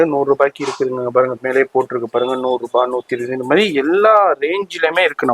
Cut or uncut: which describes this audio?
uncut